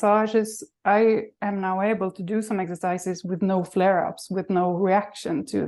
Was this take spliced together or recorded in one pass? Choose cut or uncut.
uncut